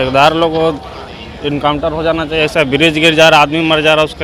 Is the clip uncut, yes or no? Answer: yes